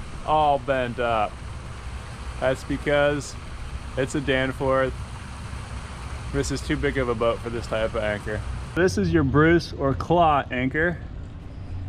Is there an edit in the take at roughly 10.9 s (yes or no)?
no